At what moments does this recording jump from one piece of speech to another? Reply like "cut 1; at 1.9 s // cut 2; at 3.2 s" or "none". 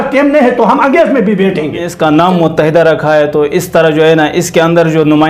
cut 1; at 1.8 s